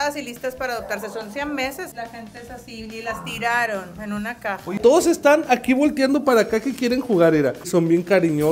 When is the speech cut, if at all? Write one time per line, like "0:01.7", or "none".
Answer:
0:01.9
0:04.8
0:07.7